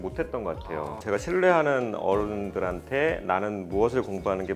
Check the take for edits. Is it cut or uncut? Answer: uncut